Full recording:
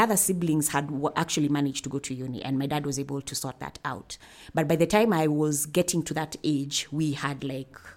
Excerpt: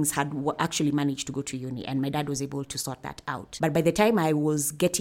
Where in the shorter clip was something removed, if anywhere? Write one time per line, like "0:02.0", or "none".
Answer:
0:03.5